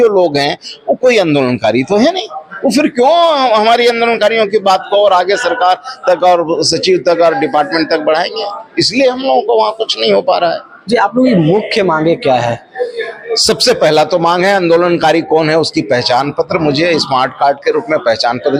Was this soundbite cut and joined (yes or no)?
no